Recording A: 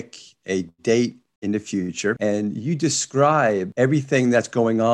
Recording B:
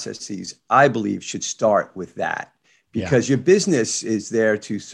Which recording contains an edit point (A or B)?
A